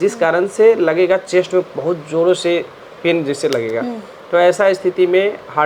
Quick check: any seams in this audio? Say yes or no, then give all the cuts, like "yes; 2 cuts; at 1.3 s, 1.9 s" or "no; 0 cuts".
no; 0 cuts